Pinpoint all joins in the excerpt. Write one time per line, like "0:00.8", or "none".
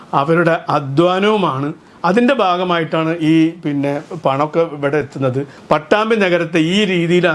0:05.5